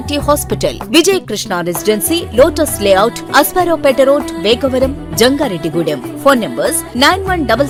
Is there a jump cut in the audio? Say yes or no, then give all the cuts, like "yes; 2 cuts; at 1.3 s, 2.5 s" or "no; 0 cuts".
no; 0 cuts